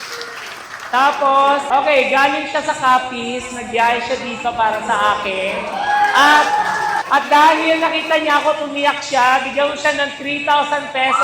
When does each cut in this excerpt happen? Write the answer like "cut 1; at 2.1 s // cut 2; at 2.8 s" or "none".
cut 1; at 1.7 s